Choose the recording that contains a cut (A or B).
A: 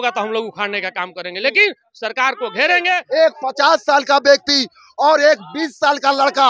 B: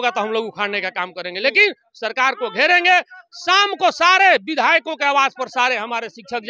A